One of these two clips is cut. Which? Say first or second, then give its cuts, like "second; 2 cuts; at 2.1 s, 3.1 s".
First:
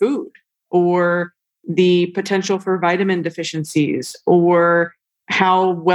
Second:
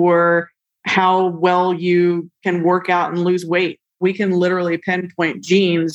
second; 1 cut; at 3.8 s